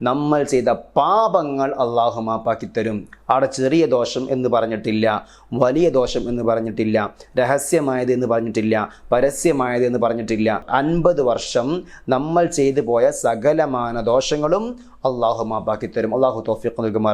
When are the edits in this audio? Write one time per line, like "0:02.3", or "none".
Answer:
0:10.6